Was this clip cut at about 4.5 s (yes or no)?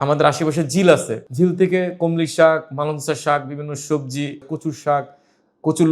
yes